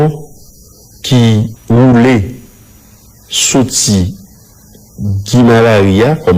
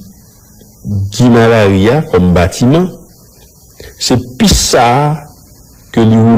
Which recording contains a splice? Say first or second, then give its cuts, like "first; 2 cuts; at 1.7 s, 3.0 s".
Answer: first; 1 cut; at 1.6 s